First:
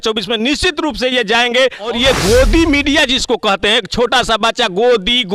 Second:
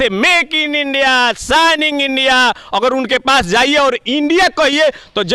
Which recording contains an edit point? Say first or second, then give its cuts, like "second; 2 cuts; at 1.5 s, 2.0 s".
first; 1 cut; at 1.8 s